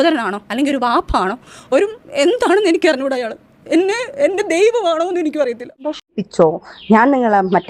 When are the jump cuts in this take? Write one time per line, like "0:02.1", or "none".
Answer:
0:06.1